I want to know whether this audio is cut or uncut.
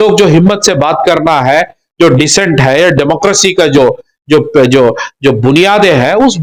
uncut